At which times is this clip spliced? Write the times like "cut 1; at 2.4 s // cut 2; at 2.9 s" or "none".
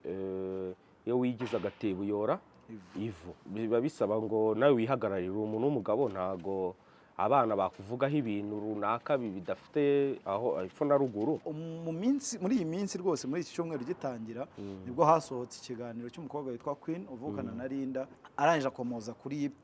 cut 1; at 3.4 s // cut 2; at 11.5 s // cut 3; at 18.2 s